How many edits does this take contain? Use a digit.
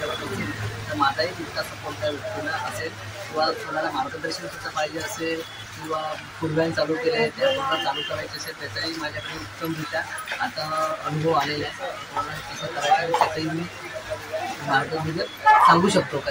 0